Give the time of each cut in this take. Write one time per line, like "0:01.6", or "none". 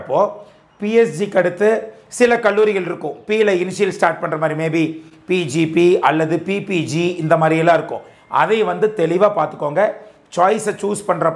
none